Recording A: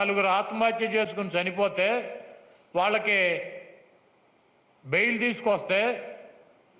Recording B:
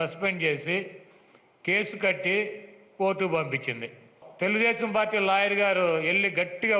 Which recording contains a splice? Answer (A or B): B